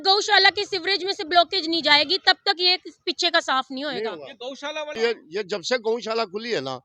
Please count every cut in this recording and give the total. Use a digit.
1